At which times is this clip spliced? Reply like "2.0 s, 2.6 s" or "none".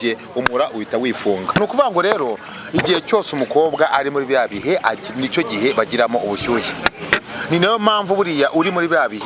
1.6 s

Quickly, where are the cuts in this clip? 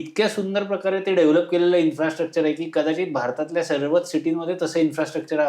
none

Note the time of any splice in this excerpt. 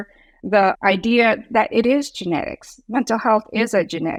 none

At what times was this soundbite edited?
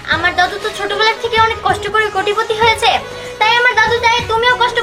none

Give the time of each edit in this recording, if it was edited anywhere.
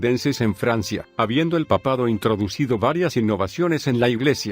1.0 s

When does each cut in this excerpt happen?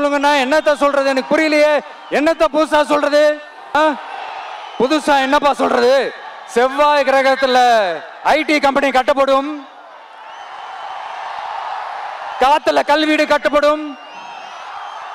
3.7 s

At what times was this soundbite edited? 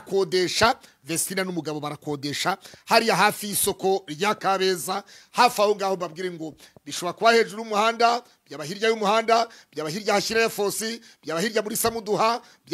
none

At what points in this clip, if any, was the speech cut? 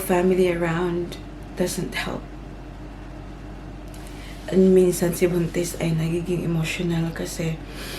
none

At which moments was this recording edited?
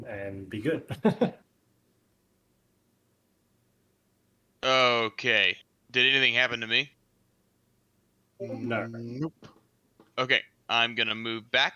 2.1 s

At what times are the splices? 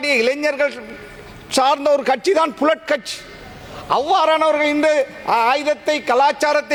none

